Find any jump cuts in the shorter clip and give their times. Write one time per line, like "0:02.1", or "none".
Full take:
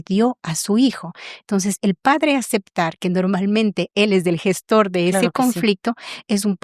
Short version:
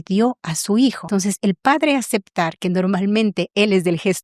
0:01.0